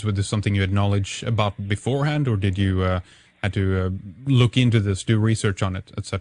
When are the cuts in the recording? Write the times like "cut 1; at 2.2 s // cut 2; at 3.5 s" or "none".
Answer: none